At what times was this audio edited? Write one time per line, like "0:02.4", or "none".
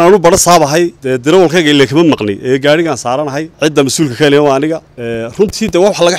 0:01.0
0:03.5
0:04.9